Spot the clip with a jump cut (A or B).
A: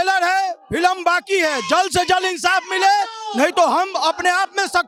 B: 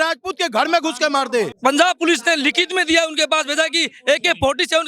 B